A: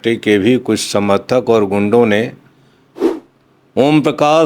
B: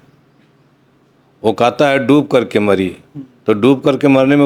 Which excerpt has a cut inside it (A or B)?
A